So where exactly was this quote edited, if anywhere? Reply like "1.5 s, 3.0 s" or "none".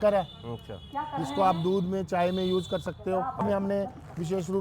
3.4 s